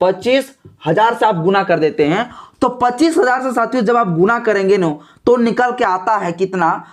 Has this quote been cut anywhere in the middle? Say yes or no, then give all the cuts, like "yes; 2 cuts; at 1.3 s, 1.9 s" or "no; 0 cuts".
no; 0 cuts